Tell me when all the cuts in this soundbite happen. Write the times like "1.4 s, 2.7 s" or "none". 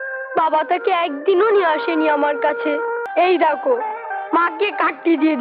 3.0 s